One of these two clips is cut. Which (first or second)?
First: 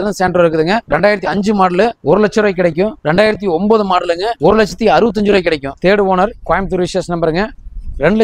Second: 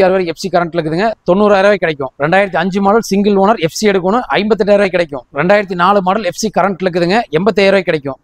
first